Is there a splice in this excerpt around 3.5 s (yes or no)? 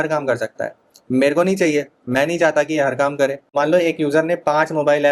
yes